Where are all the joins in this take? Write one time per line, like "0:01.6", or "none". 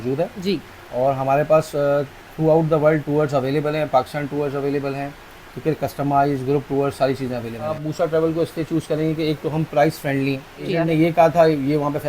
0:07.8
0:10.7